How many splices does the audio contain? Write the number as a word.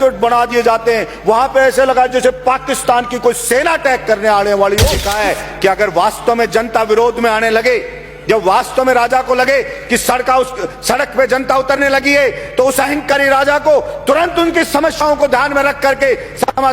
one